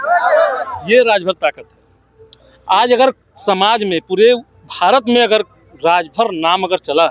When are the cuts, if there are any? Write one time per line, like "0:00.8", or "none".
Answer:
none